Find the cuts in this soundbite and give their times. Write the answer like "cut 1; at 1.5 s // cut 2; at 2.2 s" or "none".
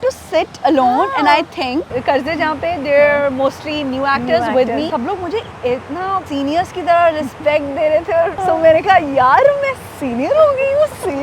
cut 1; at 1.9 s // cut 2; at 4.9 s // cut 3; at 6.3 s // cut 4; at 8.4 s